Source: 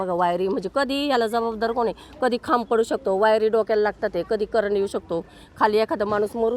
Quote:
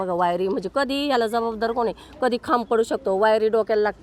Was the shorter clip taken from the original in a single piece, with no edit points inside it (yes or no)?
yes